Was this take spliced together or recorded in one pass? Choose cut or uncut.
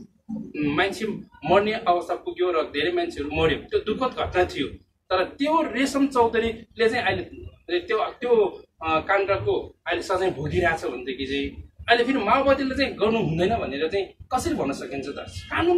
uncut